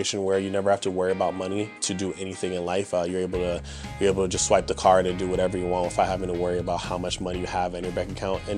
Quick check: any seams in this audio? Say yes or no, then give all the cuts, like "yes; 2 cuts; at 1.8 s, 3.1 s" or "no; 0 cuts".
yes; 1 cut; at 1.8 s